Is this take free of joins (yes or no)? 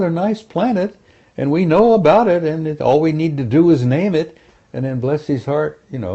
yes